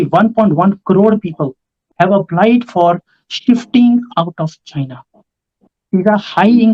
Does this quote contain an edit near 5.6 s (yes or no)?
yes